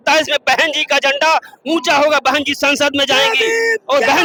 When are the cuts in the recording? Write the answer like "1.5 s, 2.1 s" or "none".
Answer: none